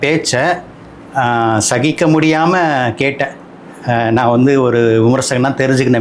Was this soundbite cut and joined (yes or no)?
no